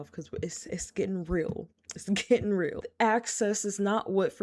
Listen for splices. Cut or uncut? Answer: cut